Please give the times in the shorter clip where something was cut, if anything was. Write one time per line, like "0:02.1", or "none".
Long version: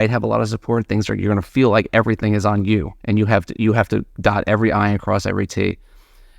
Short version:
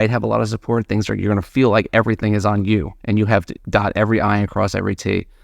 0:03.5